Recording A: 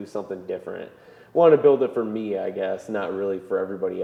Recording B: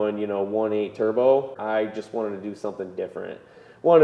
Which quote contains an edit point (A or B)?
B